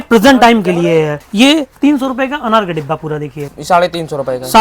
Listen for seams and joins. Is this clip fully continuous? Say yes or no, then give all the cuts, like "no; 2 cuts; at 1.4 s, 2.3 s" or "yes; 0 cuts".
no; 2 cuts; at 1.2 s, 3.5 s